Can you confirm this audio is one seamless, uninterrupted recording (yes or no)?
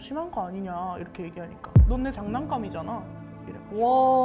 yes